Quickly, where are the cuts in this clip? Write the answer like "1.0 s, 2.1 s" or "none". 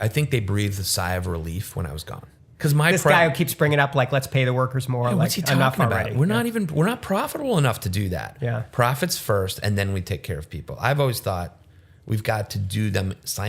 2.4 s